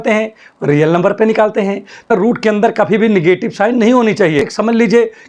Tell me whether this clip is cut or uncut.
cut